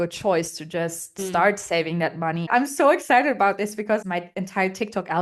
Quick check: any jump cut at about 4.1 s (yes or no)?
yes